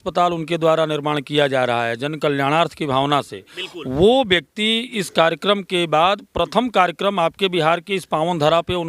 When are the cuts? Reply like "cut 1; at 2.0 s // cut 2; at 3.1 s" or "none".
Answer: none

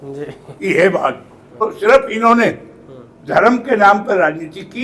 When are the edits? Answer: cut 1; at 1.6 s

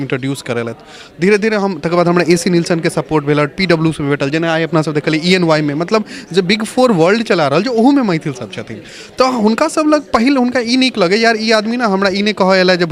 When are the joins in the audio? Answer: none

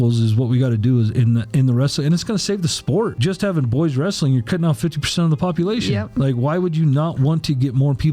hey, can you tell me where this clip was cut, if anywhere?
cut 1; at 3.2 s

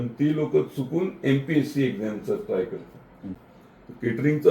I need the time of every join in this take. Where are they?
cut 1; at 3.4 s

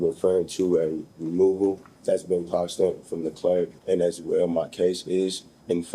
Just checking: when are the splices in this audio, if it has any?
cut 1; at 1.9 s // cut 2; at 3.8 s

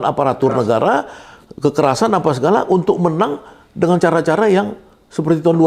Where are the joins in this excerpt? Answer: none

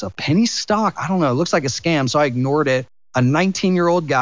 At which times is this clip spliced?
cut 1; at 1.0 s // cut 2; at 3.0 s

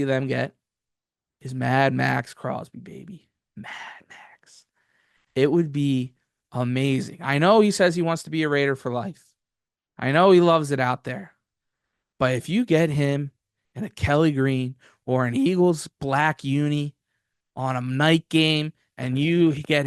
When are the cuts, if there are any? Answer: none

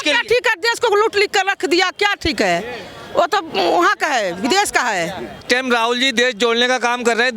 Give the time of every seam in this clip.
cut 1; at 5.4 s

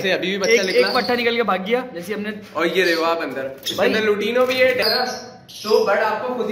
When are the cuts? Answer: cut 1; at 4.8 s

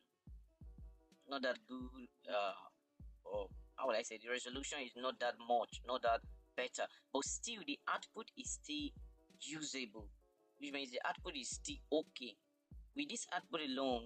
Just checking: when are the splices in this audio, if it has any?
none

